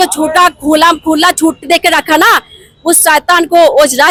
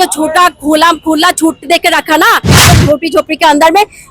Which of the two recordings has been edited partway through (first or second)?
second